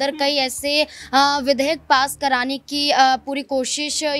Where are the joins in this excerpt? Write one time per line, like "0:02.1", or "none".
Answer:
none